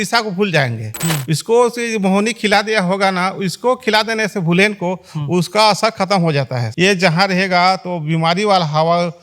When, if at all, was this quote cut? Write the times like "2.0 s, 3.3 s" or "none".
0.9 s, 6.6 s